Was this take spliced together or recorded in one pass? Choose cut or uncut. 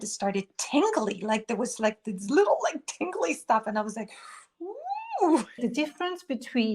cut